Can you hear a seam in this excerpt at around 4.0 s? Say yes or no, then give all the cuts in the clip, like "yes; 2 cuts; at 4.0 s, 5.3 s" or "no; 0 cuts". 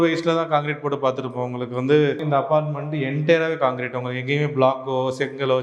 no; 1 cut; at 2.2 s